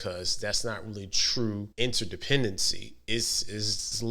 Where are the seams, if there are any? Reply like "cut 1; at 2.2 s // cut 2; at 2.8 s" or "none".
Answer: cut 1; at 1.7 s